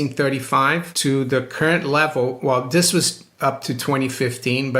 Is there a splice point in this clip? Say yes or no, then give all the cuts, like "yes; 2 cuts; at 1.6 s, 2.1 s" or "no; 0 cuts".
yes; 1 cut; at 0.9 s